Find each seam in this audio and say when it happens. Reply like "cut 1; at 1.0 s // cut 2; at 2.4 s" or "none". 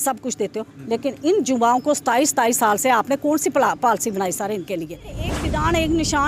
cut 1; at 5.3 s